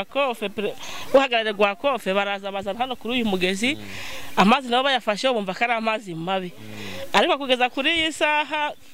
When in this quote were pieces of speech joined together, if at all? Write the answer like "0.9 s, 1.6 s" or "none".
none

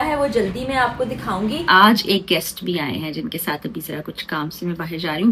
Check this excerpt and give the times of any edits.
1.6 s

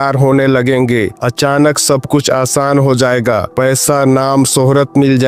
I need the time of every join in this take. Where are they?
none

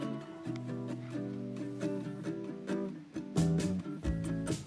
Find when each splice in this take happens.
none

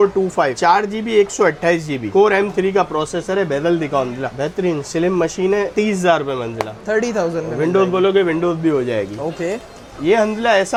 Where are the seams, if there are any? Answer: none

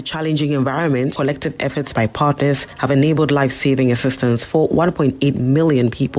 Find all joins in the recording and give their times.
1.1 s

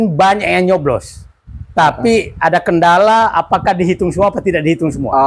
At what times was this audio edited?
none

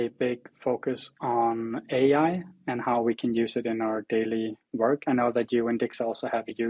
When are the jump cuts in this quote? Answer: none

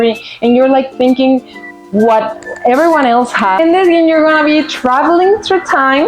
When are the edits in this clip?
3.6 s

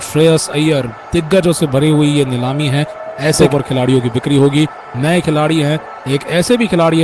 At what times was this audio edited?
3.4 s

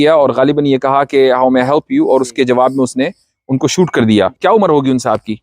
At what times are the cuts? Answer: 4.4 s

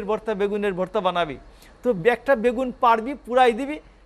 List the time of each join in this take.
none

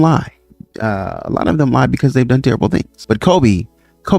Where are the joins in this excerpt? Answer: 2.9 s

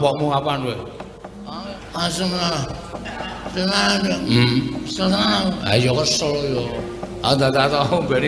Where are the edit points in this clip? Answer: 1.7 s

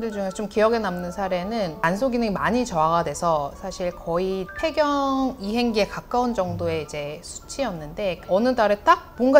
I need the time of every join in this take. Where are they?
1.8 s, 8.2 s

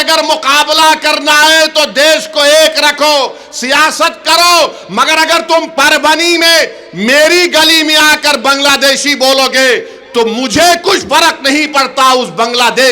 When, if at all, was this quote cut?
none

